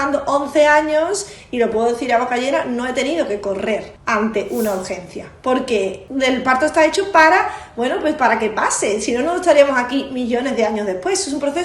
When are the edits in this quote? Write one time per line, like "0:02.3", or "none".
0:03.9
0:06.0